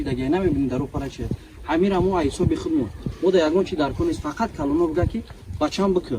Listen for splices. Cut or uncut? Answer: uncut